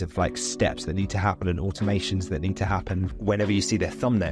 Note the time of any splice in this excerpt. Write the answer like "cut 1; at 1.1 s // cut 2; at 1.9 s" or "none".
cut 1; at 3.1 s